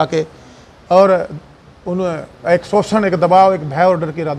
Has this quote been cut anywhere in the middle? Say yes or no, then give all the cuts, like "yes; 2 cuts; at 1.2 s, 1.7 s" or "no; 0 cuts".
no; 0 cuts